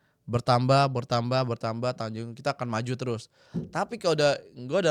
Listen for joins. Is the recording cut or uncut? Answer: uncut